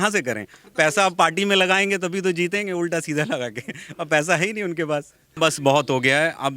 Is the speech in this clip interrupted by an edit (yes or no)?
yes